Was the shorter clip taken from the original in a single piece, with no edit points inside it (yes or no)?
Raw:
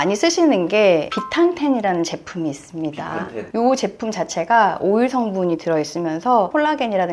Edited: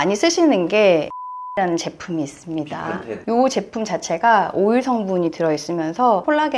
no